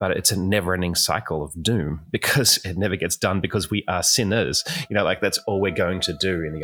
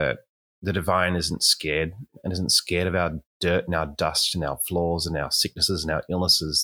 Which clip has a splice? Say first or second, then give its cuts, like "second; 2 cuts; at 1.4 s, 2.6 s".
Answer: second; 1 cut; at 2.2 s